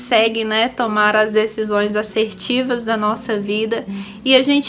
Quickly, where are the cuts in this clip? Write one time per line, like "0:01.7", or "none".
none